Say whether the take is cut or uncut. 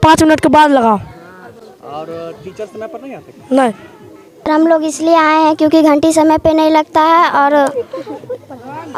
uncut